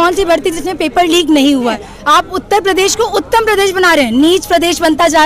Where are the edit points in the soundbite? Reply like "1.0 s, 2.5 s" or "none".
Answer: 1.9 s